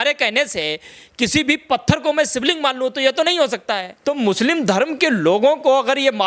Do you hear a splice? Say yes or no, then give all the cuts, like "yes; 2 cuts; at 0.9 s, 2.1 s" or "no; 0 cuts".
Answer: yes; 1 cut; at 3.9 s